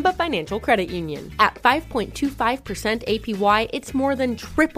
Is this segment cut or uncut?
uncut